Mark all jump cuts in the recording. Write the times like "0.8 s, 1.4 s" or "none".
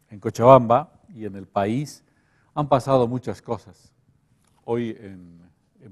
2.8 s